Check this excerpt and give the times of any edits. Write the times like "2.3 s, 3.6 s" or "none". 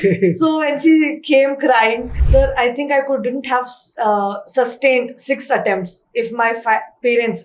2.1 s